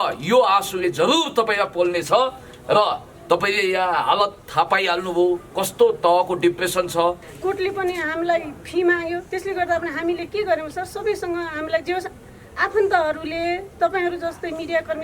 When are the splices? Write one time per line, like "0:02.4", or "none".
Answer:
0:07.3